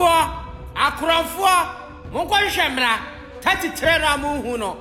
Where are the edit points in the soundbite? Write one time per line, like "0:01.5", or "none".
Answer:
none